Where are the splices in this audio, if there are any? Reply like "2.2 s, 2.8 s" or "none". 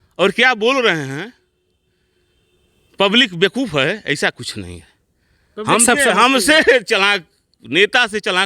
none